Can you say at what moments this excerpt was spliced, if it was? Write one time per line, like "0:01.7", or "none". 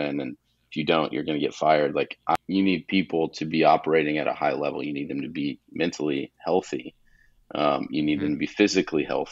0:02.4